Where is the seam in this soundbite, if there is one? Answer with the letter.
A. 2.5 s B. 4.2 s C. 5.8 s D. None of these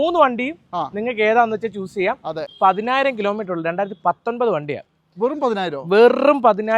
A